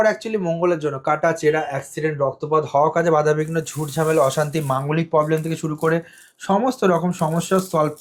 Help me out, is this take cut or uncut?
uncut